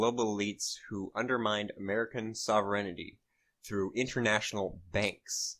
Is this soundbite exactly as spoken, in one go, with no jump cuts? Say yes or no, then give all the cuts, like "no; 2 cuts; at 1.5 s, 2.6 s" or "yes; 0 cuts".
no; 1 cut; at 2.0 s